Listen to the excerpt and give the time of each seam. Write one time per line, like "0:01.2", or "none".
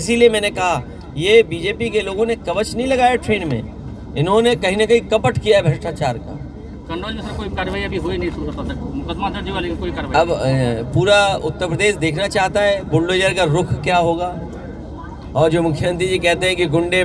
none